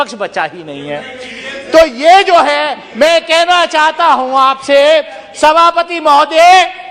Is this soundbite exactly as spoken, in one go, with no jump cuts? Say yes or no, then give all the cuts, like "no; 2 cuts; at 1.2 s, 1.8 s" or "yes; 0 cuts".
yes; 0 cuts